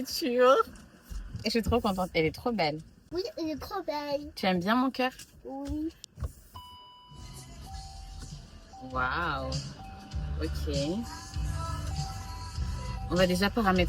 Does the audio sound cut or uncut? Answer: uncut